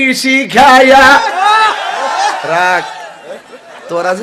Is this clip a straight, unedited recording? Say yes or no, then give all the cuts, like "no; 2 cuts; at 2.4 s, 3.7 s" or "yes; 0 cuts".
yes; 0 cuts